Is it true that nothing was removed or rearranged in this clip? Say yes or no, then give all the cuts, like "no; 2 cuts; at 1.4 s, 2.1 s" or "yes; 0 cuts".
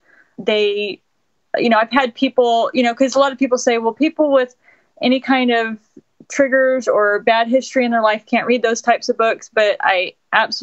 yes; 0 cuts